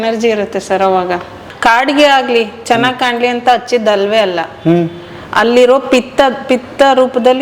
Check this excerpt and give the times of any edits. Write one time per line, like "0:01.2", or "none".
0:01.5